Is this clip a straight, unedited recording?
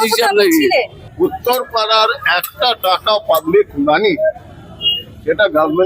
no; 1 cut; at 1.0 s

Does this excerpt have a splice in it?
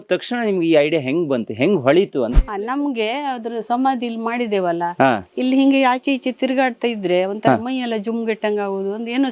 yes; 1 cut; at 2.4 s

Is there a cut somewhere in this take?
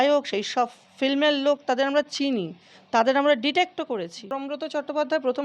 yes; 1 cut; at 4.5 s

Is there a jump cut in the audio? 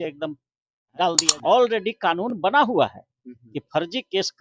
yes; 1 cut; at 1.3 s

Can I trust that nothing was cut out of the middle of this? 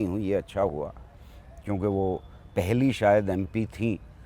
yes; 0 cuts

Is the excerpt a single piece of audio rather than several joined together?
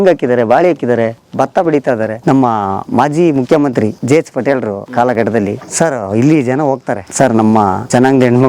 no; 1 cut; at 2.2 s

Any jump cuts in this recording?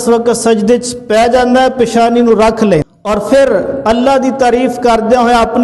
yes; 1 cut; at 2.9 s

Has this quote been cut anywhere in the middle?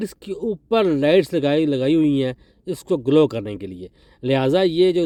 no; 0 cuts

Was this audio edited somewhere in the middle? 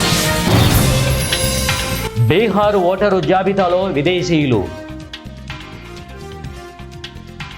no; 0 cuts

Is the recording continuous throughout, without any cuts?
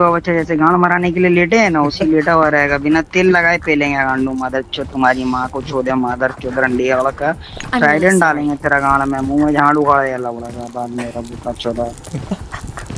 yes; 0 cuts

